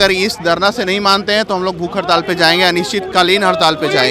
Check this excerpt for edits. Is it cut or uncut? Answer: uncut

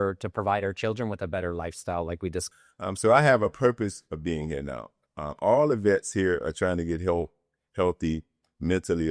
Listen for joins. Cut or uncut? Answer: cut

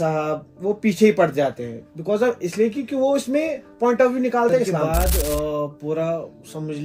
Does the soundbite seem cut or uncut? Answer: cut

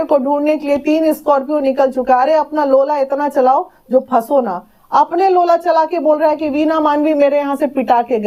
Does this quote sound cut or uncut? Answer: uncut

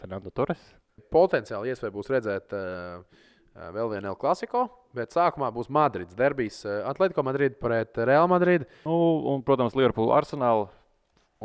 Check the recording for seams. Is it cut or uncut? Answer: cut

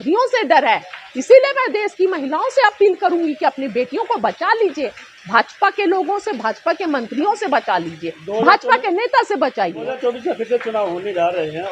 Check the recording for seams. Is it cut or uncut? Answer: cut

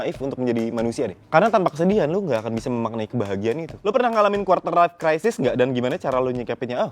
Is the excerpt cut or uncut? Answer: cut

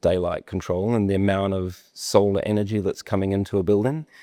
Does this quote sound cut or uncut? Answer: uncut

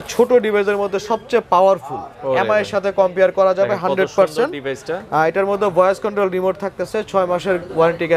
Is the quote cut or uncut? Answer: uncut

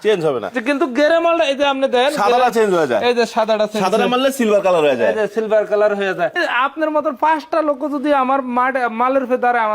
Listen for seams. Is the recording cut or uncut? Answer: cut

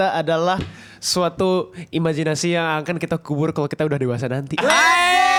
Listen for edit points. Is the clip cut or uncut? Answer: uncut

